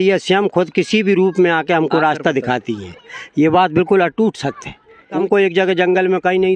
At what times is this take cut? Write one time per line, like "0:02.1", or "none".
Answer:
0:05.2